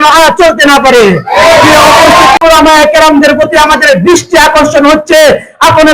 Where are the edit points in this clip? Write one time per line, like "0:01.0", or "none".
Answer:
0:02.4